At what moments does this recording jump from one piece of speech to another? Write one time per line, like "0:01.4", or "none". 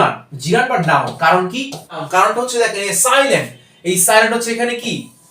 0:02.0